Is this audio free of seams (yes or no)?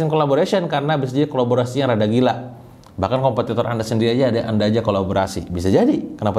yes